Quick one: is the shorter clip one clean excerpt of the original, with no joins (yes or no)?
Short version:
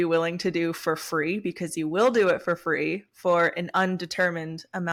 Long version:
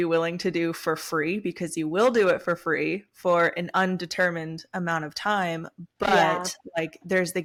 yes